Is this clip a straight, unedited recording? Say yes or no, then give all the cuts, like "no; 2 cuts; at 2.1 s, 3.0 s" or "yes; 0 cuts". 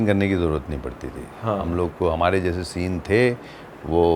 yes; 0 cuts